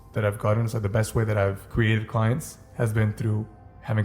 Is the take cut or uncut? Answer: cut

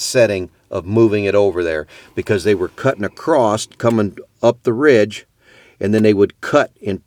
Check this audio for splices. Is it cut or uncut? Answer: uncut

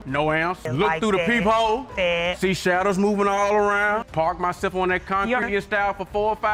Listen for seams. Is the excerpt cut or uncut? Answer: uncut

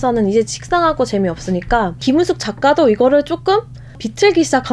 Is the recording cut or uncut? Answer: uncut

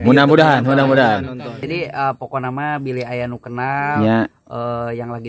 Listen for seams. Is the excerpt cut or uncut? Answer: cut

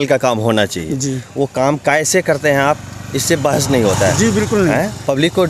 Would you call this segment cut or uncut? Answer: uncut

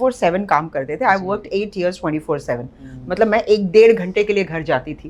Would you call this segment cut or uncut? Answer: uncut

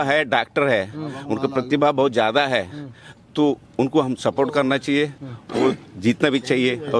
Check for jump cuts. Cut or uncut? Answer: uncut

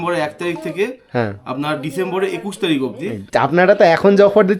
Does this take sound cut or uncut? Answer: cut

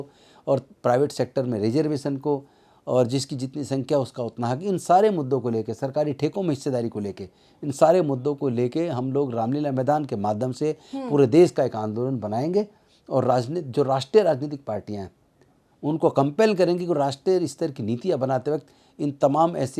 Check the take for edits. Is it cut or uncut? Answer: uncut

